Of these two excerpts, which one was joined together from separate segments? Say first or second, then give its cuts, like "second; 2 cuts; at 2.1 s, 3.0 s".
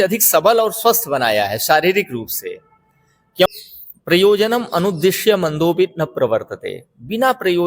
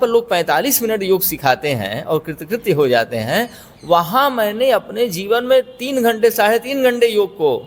first; 1 cut; at 3.5 s